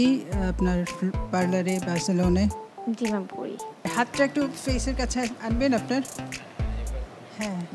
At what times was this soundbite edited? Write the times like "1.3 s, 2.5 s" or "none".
none